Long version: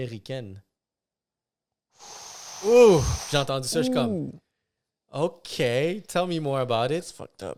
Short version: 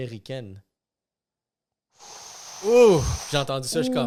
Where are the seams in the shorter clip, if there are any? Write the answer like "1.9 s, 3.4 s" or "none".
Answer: none